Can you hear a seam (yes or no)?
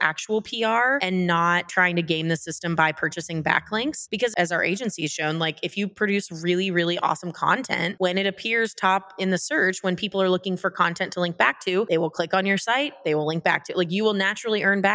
yes